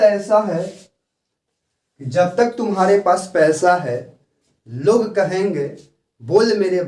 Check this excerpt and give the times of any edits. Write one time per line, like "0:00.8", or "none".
none